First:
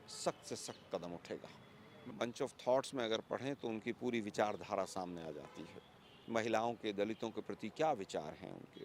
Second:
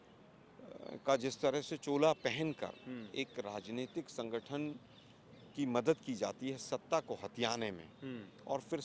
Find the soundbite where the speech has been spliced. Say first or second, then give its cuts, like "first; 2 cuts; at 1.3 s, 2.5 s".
first; 1 cut; at 2.1 s